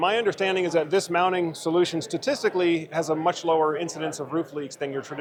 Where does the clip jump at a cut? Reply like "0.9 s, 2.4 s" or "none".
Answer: none